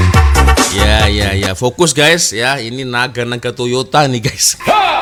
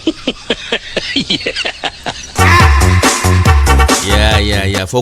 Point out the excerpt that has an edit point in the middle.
second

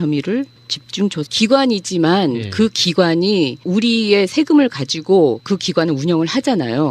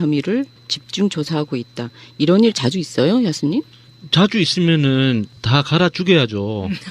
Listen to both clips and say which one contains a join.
second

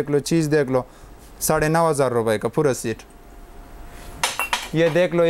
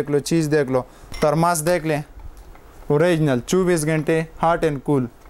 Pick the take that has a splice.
second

